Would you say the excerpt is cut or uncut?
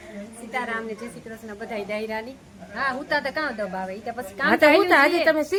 uncut